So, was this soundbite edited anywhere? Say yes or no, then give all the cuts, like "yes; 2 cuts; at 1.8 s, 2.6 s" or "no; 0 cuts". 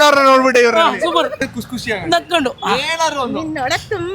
yes; 1 cut; at 1.4 s